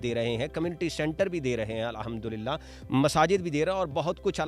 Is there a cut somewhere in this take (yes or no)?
no